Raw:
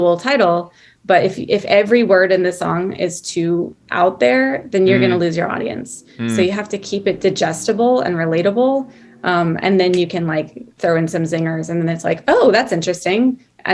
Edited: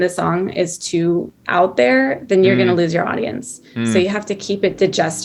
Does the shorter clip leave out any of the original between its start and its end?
no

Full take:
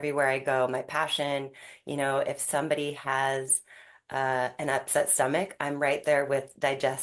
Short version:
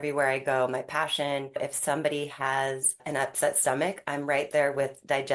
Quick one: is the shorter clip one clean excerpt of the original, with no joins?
no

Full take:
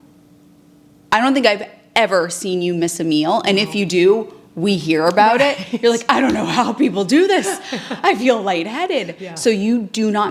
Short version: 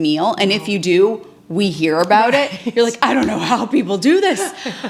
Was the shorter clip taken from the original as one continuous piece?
yes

